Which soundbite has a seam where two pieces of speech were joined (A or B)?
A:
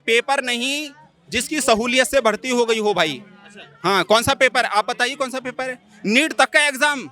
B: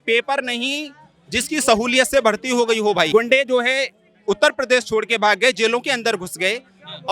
B